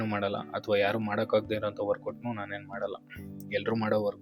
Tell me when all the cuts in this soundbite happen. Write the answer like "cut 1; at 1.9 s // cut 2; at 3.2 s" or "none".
none